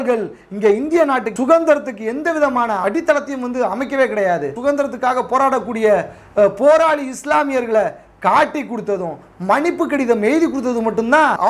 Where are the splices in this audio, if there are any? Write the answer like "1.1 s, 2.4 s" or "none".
1.3 s, 2.8 s, 4.5 s